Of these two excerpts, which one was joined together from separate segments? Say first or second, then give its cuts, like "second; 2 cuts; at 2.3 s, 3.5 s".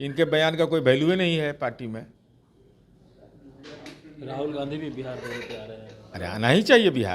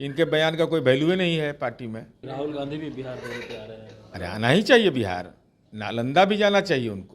second; 1 cut; at 2.1 s